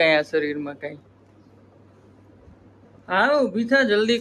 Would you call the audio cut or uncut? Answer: uncut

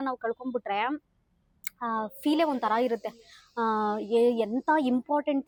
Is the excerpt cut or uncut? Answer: uncut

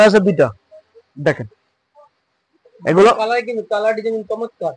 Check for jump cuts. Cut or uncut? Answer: uncut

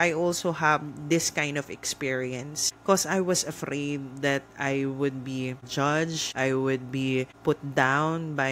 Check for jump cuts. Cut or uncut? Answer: uncut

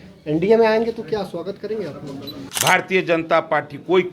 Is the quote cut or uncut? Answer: cut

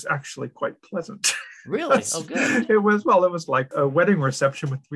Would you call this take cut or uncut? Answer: cut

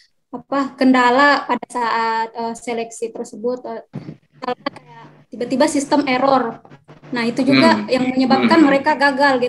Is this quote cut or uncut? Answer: uncut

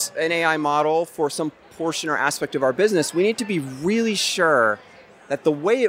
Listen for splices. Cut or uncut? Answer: uncut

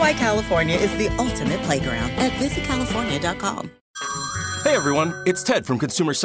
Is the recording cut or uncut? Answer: cut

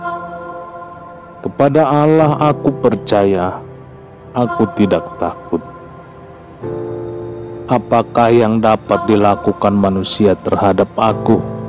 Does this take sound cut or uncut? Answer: uncut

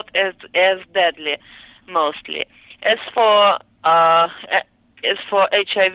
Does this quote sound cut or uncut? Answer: uncut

